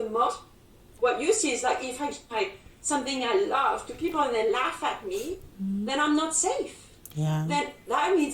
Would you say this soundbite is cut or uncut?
cut